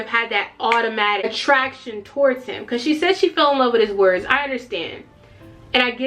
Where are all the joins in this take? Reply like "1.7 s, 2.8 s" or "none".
1.2 s